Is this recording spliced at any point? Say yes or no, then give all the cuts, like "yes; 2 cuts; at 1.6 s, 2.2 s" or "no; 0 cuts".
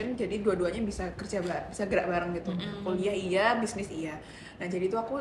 no; 0 cuts